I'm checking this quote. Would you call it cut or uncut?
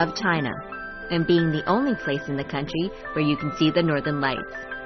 cut